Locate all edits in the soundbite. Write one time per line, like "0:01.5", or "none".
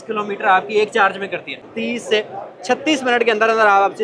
0:01.7